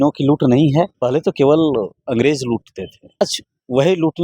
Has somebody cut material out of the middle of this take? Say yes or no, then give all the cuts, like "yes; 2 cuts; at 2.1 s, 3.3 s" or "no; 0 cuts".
yes; 2 cuts; at 0.9 s, 3.2 s